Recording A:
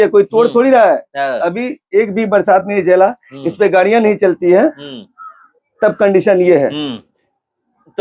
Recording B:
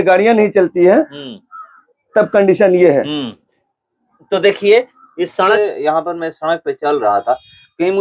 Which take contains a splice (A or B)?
B